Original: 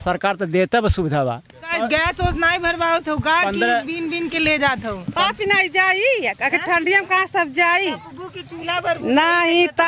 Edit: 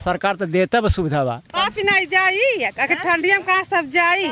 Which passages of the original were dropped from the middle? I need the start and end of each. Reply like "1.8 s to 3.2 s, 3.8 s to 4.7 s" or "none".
1.5 s to 5.1 s